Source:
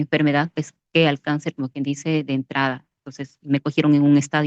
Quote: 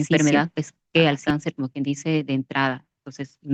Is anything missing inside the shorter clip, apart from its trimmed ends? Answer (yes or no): no